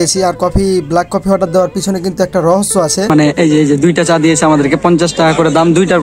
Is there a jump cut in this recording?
yes; 1 cut; at 3.1 s

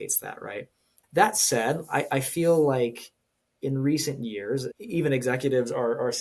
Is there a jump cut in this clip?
yes; 2 cuts; at 0.9 s, 4.7 s

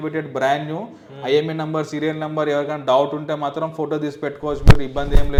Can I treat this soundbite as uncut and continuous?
yes; 0 cuts

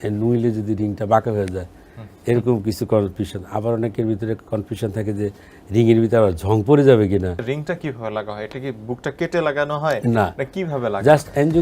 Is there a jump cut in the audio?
yes; 1 cut; at 7.4 s

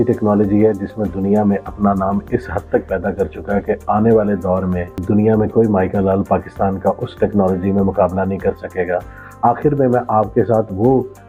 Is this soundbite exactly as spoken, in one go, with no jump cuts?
yes; 0 cuts

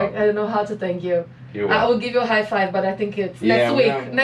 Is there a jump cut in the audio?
no; 0 cuts

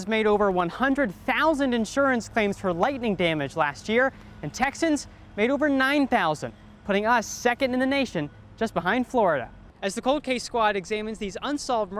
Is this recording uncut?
no; 1 cut; at 9.6 s

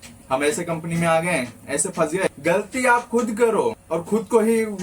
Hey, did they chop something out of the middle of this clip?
yes; 2 cuts; at 2.4 s, 3.8 s

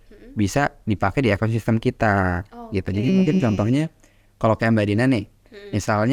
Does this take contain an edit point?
no; 0 cuts

